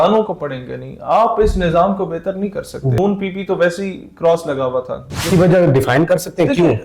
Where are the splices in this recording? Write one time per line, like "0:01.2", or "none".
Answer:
0:03.0
0:05.3